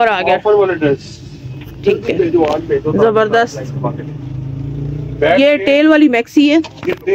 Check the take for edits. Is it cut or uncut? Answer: uncut